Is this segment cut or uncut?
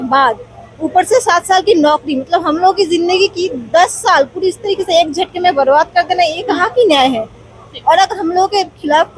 uncut